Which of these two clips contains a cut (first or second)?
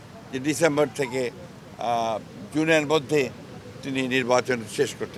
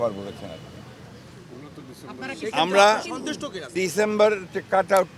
second